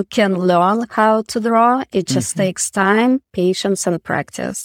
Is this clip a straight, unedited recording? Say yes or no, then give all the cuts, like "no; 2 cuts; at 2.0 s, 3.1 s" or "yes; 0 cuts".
yes; 0 cuts